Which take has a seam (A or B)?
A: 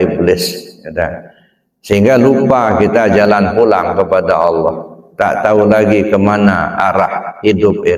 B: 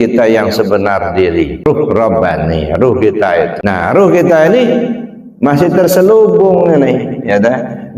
B